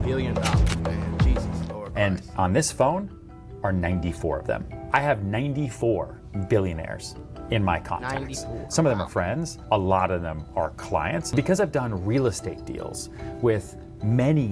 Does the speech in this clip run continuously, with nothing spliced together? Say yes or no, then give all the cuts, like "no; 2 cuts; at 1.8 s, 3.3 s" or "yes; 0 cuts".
no; 1 cut; at 11.3 s